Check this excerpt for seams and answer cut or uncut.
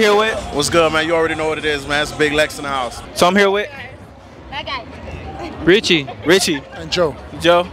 cut